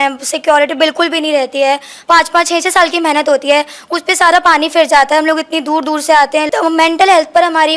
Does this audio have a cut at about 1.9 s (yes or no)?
yes